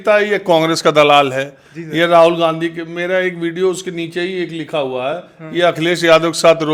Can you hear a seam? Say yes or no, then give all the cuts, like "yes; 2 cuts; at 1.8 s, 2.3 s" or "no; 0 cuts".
no; 0 cuts